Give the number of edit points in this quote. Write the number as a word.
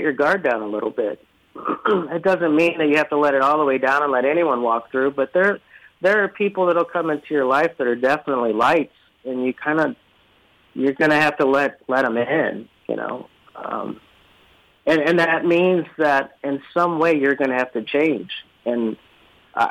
zero